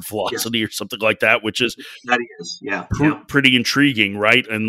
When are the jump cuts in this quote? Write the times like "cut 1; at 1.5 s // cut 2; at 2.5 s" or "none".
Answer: none